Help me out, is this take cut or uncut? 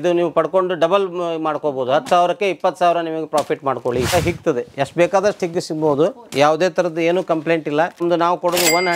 cut